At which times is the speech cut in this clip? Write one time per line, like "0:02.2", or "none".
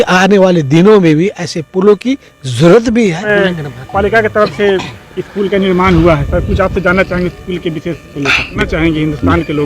0:03.2
0:08.5